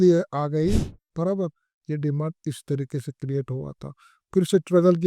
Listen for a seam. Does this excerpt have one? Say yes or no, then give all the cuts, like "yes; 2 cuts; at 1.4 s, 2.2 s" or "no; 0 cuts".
yes; 1 cut; at 1.0 s